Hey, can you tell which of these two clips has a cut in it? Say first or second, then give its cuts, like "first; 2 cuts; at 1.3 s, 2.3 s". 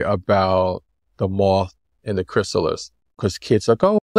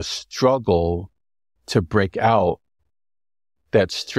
first; 1 cut; at 3.1 s